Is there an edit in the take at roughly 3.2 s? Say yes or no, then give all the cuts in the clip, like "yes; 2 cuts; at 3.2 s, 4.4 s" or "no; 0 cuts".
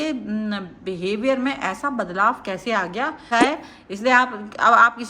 yes; 1 cut; at 3.2 s